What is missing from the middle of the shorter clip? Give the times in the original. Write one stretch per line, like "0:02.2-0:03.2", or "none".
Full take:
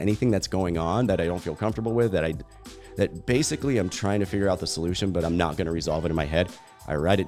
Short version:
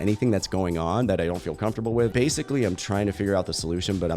0:02.1-0:03.2